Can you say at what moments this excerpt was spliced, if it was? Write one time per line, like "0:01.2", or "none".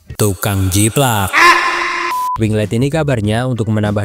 0:02.1